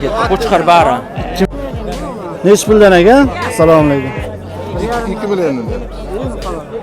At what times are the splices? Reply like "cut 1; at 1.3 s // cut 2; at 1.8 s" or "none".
cut 1; at 1.5 s